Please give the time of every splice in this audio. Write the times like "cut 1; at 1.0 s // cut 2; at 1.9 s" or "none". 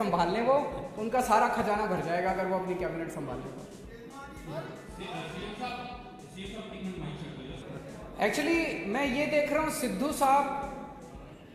cut 1; at 7.6 s